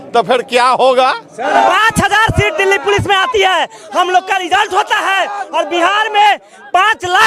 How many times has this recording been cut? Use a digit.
1